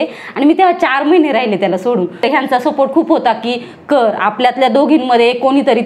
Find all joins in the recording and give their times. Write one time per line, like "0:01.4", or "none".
none